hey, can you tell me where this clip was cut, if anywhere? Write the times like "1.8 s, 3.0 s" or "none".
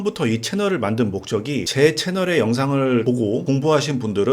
1.7 s, 3.1 s